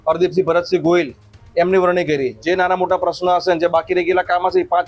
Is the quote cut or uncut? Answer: cut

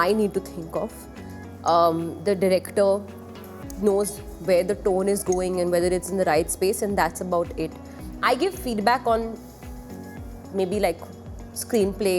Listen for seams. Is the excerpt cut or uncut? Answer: uncut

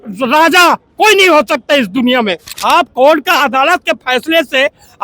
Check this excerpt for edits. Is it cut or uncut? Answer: cut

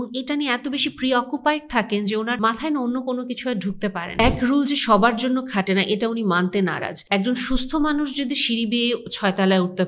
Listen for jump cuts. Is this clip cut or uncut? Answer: cut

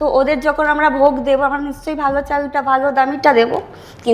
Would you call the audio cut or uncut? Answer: uncut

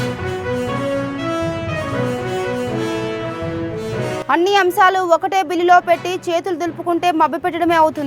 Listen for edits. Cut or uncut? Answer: cut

